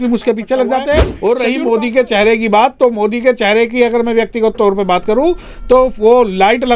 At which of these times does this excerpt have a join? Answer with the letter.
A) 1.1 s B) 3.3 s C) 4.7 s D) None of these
A